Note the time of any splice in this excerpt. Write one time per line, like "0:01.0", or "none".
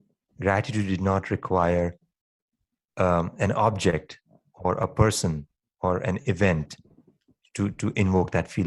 none